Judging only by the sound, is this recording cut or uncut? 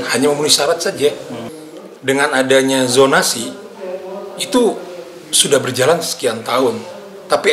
cut